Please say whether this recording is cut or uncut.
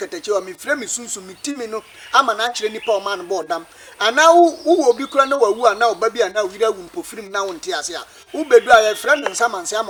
uncut